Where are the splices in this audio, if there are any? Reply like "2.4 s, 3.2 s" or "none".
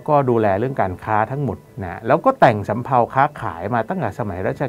none